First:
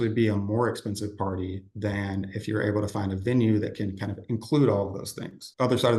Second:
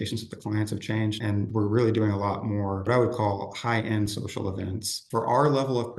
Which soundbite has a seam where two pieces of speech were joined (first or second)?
second